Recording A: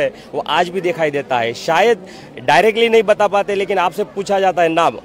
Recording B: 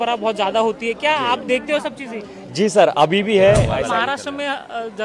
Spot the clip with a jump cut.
B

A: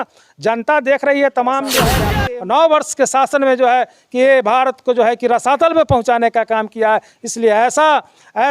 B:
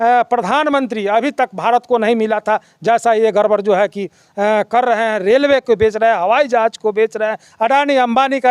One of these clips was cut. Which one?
A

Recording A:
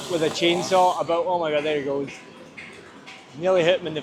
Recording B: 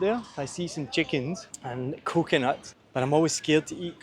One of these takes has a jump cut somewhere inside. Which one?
B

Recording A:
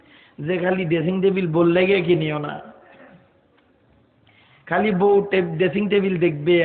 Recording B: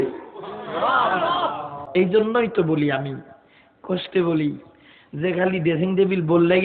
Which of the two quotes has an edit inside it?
B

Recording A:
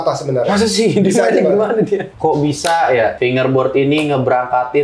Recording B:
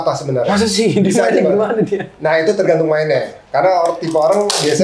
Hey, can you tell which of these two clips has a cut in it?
A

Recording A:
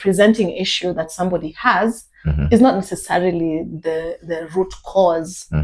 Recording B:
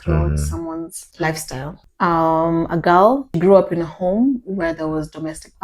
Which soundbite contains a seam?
B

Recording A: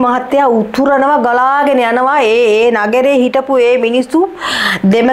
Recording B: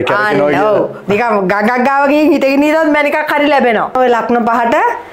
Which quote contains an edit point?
B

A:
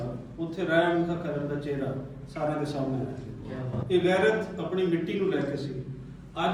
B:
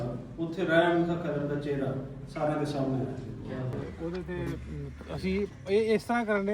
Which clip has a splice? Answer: B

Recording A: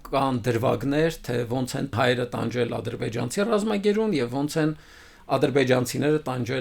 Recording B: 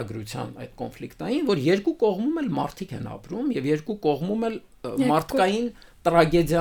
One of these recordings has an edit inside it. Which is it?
A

